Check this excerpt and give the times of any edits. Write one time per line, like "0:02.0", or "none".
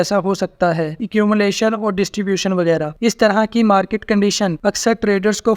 0:01.0
0:02.9
0:04.6